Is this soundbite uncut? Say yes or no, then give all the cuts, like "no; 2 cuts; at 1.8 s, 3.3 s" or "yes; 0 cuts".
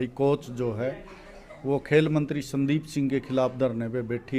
yes; 0 cuts